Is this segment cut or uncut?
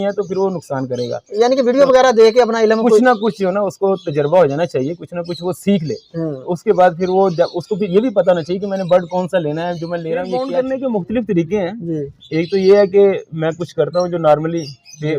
cut